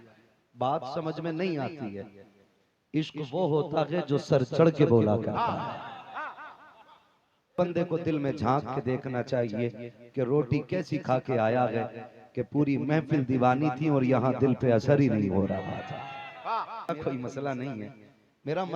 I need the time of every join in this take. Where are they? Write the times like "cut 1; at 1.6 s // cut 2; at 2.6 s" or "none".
cut 1; at 7.6 s // cut 2; at 16.9 s